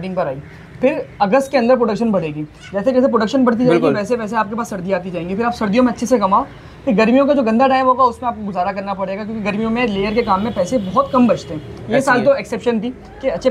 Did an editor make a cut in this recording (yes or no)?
no